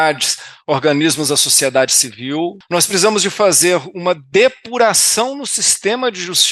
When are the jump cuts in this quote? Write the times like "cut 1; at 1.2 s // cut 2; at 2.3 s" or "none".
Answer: cut 1; at 2.6 s